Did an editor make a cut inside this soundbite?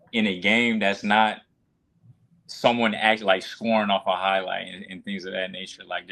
no; 0 cuts

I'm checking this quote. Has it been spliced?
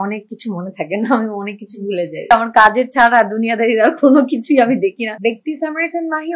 yes; 2 cuts; at 2.3 s, 5.1 s

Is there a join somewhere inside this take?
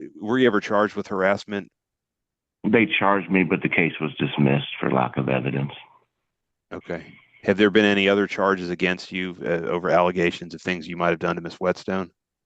no; 0 cuts

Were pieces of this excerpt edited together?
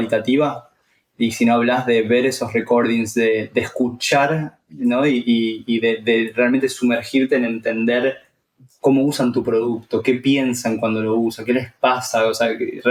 no; 0 cuts

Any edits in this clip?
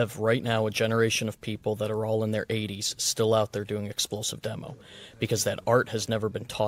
no; 0 cuts

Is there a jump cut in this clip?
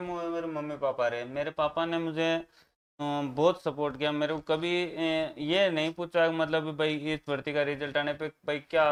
no; 0 cuts

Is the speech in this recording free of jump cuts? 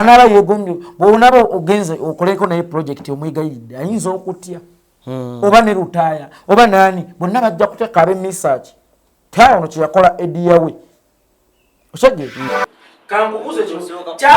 no; 1 cut; at 12.4 s

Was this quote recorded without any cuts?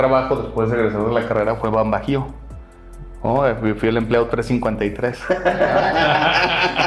yes; 0 cuts

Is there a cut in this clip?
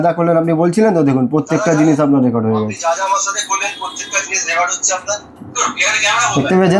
no; 0 cuts

